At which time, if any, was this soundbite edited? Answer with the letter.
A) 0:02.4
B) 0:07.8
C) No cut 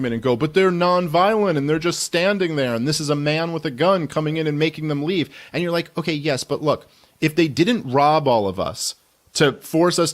B